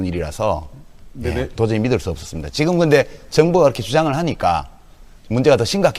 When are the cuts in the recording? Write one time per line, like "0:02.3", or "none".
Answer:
0:04.0